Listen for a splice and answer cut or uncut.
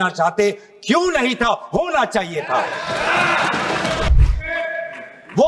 cut